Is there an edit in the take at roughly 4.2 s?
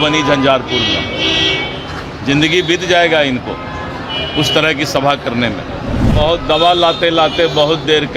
no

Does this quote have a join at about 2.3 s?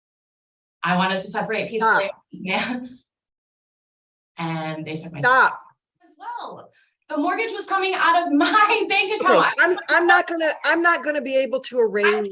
no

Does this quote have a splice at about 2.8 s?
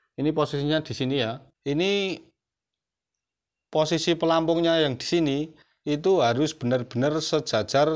no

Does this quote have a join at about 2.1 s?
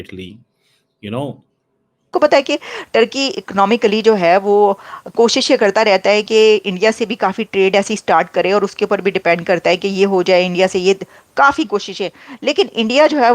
yes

